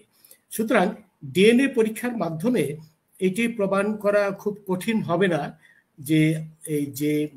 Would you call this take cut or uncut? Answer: uncut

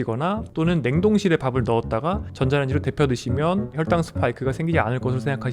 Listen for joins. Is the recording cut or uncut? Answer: cut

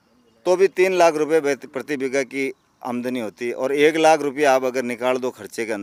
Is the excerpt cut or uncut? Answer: uncut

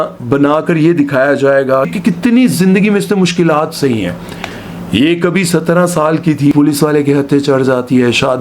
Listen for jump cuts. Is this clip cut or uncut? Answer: cut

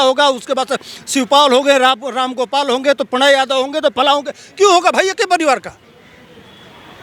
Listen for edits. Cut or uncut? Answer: uncut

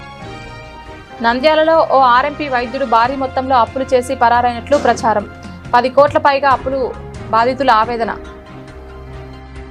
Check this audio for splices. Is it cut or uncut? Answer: uncut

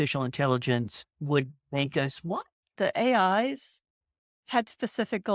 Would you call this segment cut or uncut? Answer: cut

